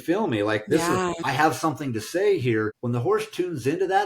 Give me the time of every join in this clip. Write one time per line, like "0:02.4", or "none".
0:01.2
0:02.8